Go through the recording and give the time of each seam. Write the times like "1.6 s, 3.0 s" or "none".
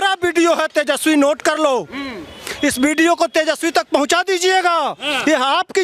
none